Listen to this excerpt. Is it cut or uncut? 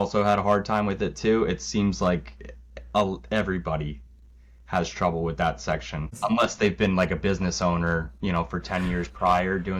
uncut